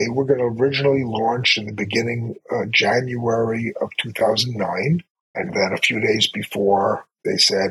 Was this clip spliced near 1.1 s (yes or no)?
no